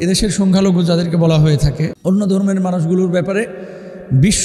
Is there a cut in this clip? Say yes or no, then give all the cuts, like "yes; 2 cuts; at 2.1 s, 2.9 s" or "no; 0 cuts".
no; 0 cuts